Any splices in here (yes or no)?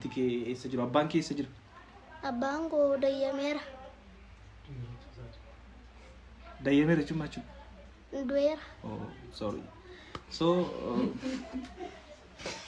no